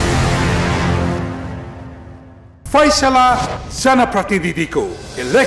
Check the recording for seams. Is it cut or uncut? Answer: cut